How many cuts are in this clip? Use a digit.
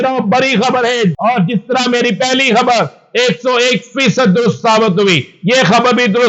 1